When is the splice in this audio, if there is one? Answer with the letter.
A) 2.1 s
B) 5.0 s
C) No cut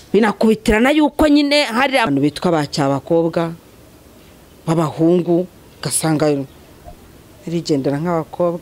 A